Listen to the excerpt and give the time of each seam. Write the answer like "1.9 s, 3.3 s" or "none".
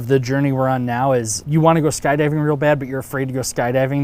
1.4 s